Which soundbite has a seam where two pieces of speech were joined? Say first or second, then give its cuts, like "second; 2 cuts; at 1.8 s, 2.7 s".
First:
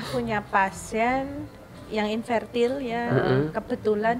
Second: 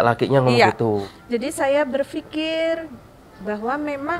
second; 1 cut; at 1.1 s